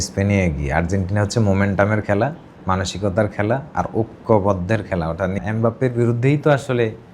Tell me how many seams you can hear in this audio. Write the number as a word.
one